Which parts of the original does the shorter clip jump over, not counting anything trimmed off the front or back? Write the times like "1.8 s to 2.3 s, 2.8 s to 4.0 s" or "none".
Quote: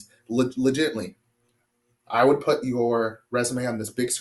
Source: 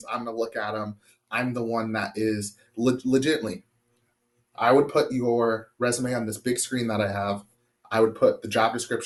none